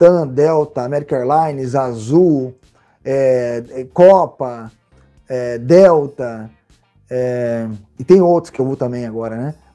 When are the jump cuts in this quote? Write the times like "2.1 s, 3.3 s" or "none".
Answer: 7.9 s